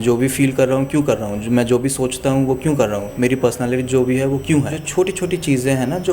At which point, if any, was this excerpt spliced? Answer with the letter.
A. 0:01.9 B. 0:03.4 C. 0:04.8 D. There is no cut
C